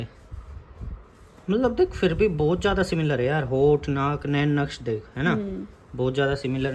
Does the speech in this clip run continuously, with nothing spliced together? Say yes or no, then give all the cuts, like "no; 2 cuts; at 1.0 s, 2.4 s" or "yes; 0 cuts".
yes; 0 cuts